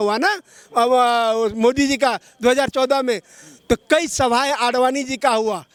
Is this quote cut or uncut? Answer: uncut